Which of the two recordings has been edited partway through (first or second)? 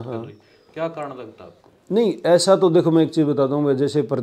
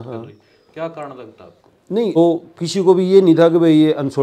second